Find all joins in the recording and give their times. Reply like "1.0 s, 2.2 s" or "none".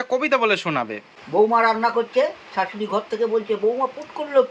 none